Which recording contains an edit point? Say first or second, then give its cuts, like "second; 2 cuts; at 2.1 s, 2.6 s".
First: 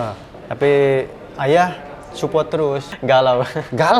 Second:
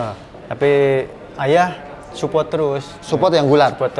first; 1 cut; at 2.9 s